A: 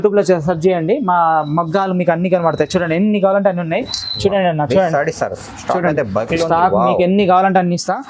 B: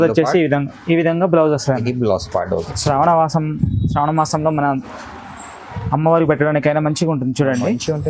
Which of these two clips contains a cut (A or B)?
B